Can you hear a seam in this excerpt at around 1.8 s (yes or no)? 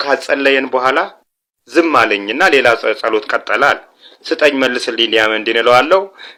no